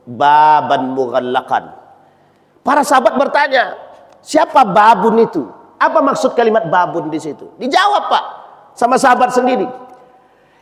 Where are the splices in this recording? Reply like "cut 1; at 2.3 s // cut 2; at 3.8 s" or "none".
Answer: none